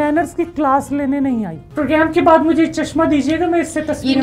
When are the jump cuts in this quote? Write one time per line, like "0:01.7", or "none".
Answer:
0:01.6

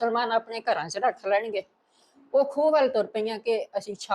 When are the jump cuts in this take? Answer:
none

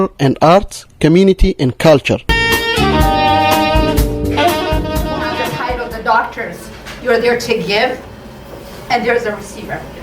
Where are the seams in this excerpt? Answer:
0:05.5

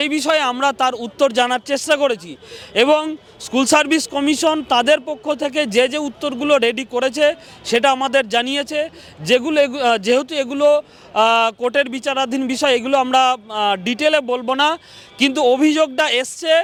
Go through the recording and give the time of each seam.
none

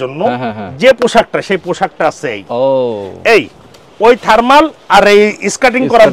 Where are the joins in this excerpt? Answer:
none

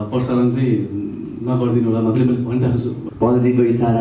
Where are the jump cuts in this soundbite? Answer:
0:03.0

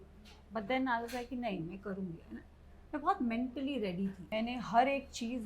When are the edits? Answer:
0:04.3

